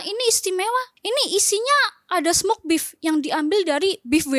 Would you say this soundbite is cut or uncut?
cut